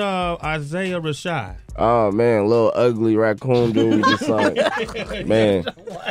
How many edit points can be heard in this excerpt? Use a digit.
1